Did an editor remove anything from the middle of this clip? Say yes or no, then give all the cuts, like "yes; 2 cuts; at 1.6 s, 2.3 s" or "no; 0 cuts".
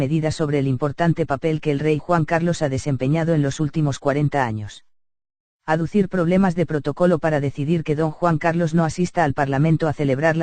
yes; 1 cut; at 7.1 s